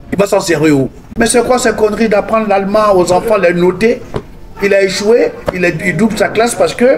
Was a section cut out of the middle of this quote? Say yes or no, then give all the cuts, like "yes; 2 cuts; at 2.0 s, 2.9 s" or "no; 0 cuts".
yes; 1 cut; at 1.0 s